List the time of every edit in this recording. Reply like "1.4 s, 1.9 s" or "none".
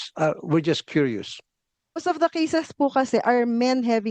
2.0 s